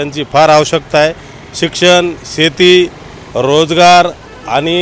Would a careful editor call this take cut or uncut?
uncut